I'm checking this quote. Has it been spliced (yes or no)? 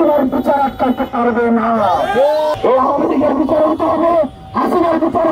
yes